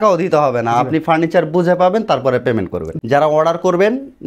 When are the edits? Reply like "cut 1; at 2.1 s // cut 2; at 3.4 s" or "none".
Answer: cut 1; at 2.8 s